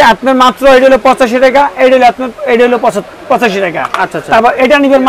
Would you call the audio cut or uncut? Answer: uncut